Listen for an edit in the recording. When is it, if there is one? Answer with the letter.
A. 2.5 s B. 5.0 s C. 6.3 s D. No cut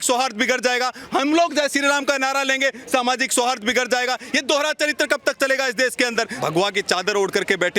C